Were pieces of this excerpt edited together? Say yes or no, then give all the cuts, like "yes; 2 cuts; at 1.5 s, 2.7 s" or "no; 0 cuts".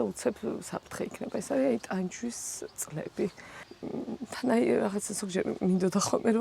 yes; 1 cut; at 3.5 s